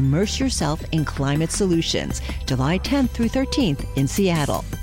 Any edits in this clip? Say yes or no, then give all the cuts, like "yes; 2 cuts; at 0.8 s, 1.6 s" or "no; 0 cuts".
no; 0 cuts